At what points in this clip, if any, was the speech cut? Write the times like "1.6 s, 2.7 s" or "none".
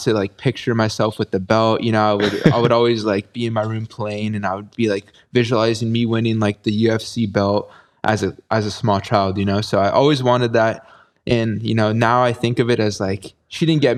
none